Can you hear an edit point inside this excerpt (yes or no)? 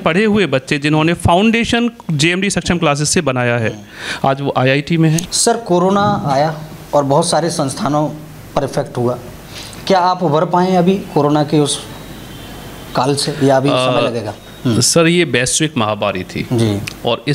no